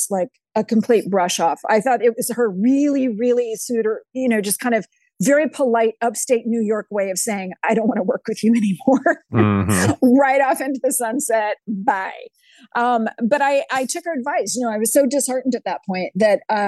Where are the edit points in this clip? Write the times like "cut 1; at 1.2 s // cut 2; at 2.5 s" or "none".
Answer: none